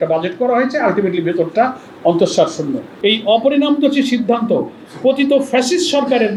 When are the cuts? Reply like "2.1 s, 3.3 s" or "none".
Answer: none